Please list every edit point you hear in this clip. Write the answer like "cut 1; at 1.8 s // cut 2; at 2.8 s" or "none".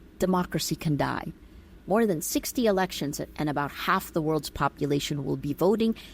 cut 1; at 1.8 s